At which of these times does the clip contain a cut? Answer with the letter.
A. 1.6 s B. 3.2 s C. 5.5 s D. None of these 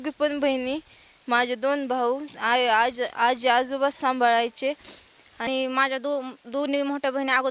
C